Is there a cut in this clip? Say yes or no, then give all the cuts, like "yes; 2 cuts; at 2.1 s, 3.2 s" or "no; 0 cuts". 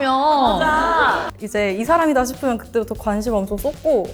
yes; 1 cut; at 1.3 s